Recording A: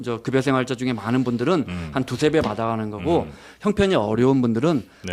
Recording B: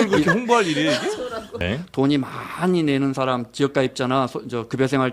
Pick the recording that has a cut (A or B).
B